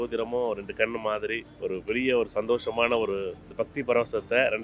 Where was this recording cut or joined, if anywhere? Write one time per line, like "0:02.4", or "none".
0:01.5
0:03.4